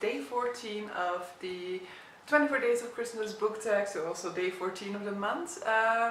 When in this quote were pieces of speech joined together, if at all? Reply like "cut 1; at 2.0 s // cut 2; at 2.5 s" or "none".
none